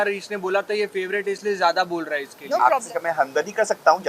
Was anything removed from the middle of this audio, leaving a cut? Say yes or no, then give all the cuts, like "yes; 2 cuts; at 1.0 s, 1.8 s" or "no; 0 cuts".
yes; 1 cut; at 2.6 s